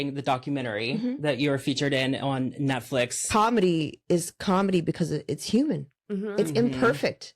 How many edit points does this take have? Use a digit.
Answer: 1